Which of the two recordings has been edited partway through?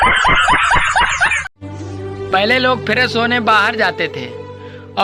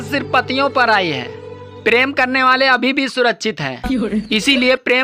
first; 1 cut; at 1.5 s

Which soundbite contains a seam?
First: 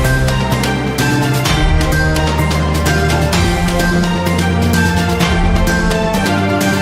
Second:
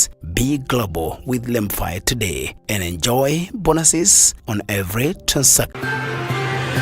second; 1 cut; at 5.7 s

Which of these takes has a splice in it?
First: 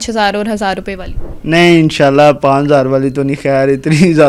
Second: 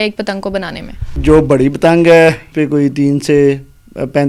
second; 2 cuts; at 1.2 s, 2.5 s

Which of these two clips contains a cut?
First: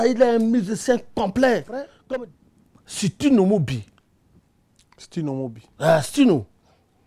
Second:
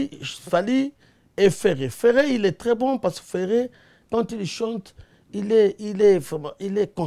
first; 1 cut; at 2.1 s

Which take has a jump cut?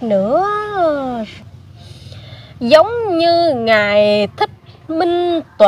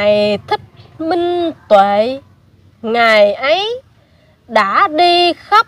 first; 1 cut; at 1.3 s

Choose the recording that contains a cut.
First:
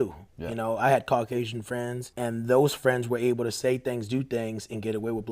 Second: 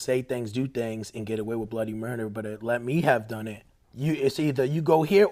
first; 1 cut; at 2.0 s

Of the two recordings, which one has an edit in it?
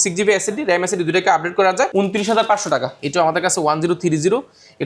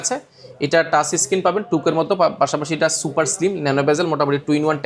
first; 2 cuts; at 1.9 s, 3.0 s

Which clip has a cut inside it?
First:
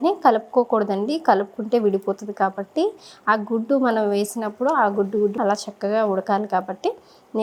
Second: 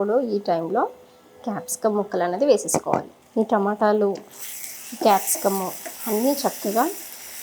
second; 1 cut; at 3.1 s

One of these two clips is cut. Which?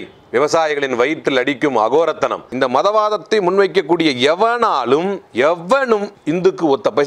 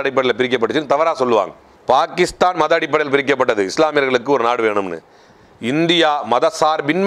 first; 3 cuts; at 2.5 s, 5.2 s, 6.1 s

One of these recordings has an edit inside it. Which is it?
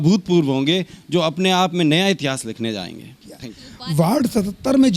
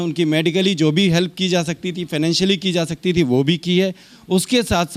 first; 1 cut; at 3.1 s

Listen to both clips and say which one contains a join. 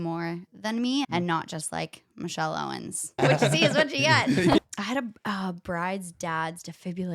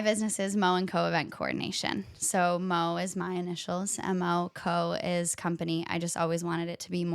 first; 3 cuts; at 1.1 s, 3.2 s, 4.6 s

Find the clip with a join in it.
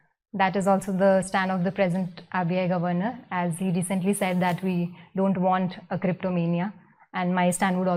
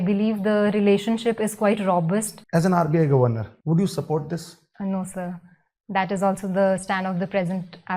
second; 3 cuts; at 2.4 s, 3.5 s, 4.6 s

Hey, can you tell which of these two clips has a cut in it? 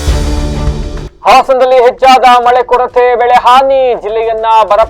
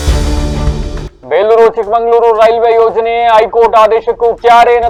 first; 1 cut; at 1.0 s

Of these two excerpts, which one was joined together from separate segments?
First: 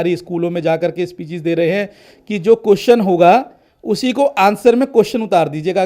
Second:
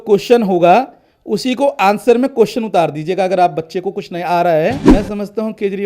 second; 1 cut; at 4.8 s

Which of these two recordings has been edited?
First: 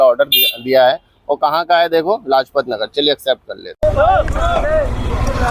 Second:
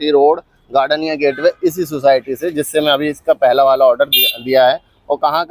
first; 1 cut; at 3.8 s

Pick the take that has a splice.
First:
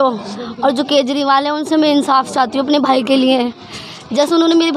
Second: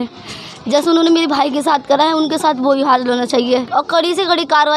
second; 1 cut; at 3.7 s

